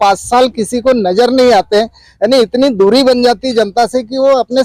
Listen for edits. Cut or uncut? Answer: uncut